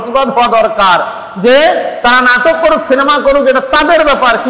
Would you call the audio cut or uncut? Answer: uncut